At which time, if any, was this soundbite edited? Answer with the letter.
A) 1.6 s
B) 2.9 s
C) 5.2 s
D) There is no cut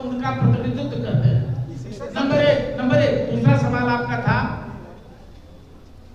D